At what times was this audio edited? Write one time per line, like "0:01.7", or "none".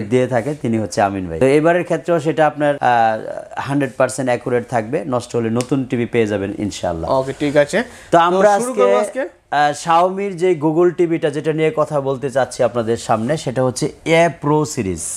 none